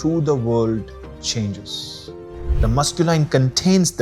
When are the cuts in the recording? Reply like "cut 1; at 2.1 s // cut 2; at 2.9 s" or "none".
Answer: cut 1; at 2.2 s